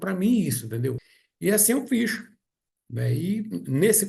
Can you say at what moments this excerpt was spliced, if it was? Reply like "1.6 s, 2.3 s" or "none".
1.1 s